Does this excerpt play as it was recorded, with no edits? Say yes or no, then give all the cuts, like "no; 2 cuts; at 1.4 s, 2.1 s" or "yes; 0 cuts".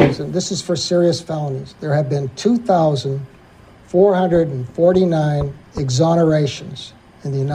yes; 0 cuts